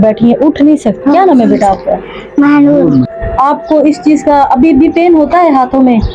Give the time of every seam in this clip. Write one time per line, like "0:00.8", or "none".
0:01.0
0:03.2